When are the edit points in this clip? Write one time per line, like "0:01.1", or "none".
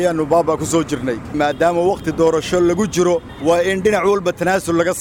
0:01.3
0:03.3